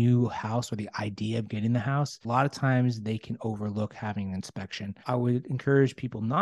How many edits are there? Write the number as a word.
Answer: two